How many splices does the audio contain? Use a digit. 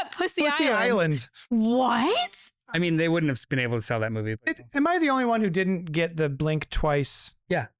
1